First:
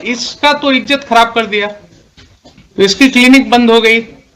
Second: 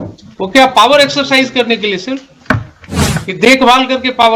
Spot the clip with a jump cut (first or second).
first